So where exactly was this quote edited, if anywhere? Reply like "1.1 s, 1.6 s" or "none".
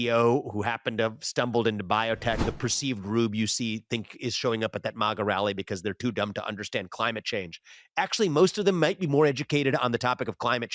2.4 s